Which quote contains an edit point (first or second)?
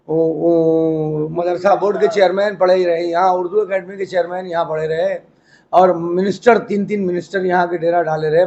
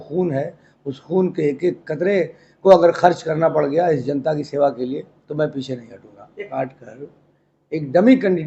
second